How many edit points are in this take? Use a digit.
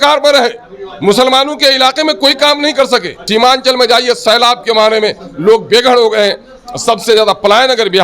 1